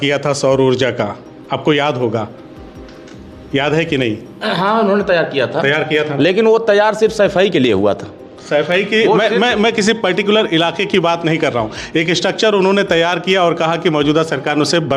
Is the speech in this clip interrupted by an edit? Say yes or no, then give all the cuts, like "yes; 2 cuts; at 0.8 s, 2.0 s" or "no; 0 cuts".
no; 0 cuts